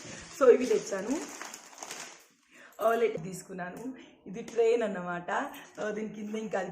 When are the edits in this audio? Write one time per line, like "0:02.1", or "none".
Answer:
0:03.1